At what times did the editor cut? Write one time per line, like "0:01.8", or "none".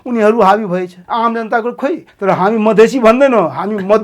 0:01.0
0:02.1